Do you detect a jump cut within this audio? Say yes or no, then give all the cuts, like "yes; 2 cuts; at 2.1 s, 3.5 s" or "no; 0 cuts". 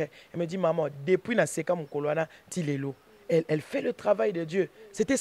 no; 0 cuts